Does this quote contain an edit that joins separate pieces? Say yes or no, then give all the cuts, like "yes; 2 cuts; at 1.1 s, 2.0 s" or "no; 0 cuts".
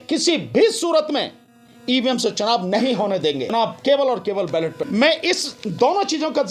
yes; 2 cuts; at 3.5 s, 4.8 s